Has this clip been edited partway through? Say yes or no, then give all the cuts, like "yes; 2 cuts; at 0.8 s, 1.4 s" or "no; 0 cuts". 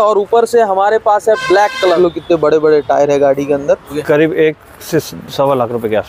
yes; 2 cuts; at 2.0 s, 3.9 s